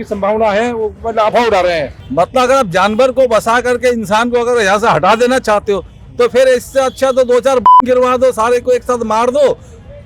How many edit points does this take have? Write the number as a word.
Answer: one